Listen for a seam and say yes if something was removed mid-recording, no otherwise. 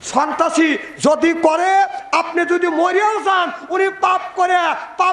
no